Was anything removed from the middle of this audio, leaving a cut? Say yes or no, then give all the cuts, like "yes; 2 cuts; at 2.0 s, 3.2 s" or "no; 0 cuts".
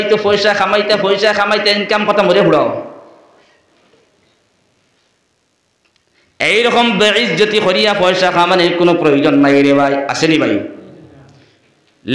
no; 0 cuts